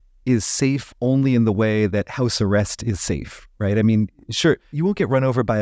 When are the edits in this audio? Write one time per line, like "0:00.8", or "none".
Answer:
0:04.7